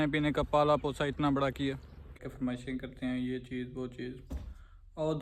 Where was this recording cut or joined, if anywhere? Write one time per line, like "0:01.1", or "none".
0:02.1